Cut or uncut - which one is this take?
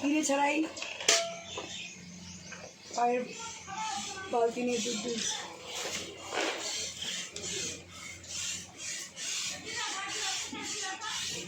uncut